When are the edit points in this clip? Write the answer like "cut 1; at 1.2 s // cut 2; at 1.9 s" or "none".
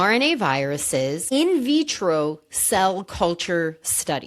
cut 1; at 1.2 s